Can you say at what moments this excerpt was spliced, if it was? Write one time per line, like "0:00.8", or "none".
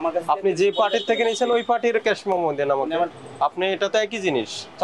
0:03.2